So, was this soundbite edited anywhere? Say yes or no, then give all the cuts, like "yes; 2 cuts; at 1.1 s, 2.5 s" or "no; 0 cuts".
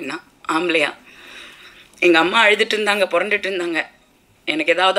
no; 0 cuts